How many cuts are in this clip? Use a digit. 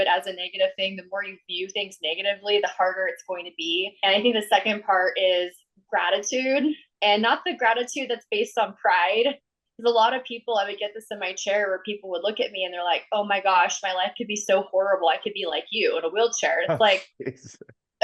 1